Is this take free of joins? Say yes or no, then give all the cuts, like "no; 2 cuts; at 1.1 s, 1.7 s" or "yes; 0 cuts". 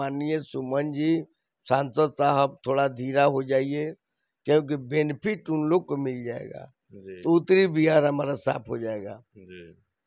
yes; 0 cuts